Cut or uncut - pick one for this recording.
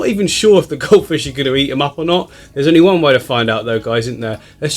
uncut